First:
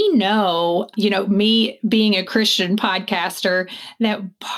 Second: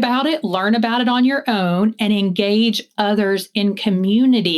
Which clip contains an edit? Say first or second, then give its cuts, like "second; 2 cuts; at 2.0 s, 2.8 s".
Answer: first; 1 cut; at 0.9 s